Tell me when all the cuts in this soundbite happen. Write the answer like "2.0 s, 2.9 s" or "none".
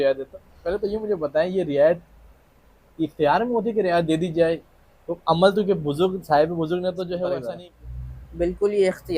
7.4 s